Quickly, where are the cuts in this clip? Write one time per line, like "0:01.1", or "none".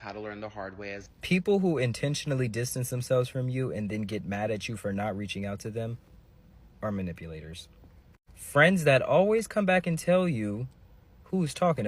0:01.0